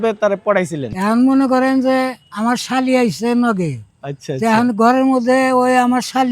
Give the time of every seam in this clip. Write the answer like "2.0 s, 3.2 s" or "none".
0.9 s